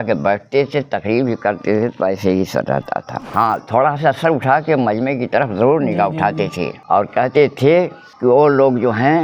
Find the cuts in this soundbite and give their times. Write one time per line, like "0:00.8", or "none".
0:03.2
0:06.7